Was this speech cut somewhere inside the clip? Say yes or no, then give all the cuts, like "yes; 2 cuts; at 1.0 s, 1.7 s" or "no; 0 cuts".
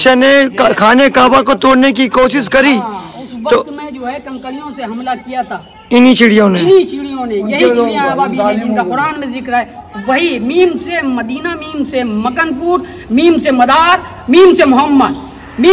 no; 0 cuts